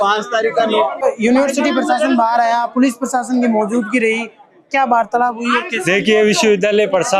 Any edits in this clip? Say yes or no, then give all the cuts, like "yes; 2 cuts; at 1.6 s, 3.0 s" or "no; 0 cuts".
no; 0 cuts